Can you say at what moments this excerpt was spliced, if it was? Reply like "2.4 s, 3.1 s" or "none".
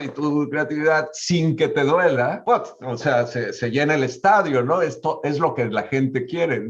2.4 s